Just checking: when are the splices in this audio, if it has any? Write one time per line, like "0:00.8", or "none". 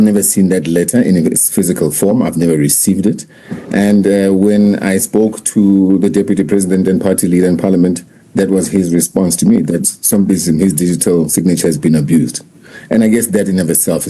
none